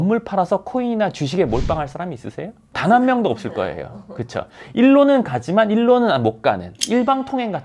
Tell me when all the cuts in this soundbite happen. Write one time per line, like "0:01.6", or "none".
0:02.6
0:06.7